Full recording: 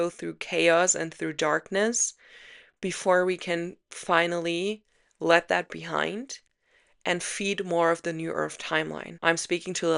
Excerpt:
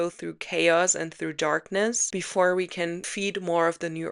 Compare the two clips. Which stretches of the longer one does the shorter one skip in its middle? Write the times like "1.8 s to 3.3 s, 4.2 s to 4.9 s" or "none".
2.0 s to 2.7 s, 3.8 s to 7.3 s